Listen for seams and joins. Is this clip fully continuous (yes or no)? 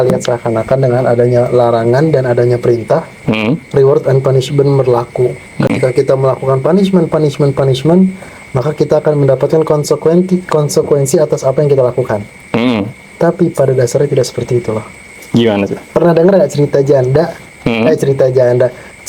yes